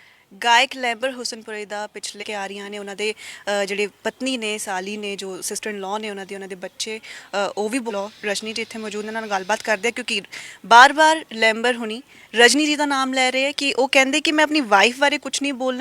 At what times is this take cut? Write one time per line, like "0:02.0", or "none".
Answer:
0:02.2
0:07.9